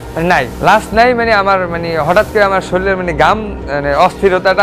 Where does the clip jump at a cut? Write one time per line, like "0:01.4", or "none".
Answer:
none